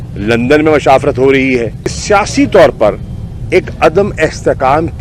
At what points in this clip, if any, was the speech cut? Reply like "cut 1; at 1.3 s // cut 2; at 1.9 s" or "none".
cut 1; at 2.0 s